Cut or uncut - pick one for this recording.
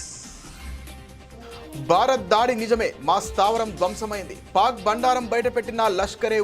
cut